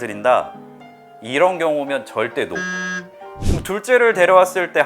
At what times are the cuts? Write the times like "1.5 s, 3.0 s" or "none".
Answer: 3.3 s